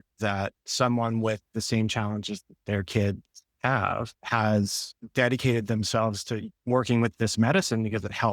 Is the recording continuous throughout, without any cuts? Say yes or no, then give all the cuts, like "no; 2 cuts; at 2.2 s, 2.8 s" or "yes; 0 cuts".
no; 1 cut; at 6.5 s